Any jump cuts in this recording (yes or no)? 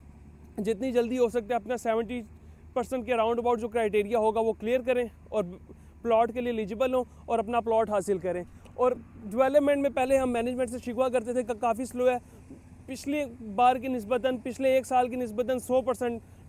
no